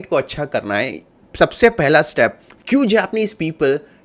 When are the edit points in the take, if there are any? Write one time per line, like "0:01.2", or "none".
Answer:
0:02.5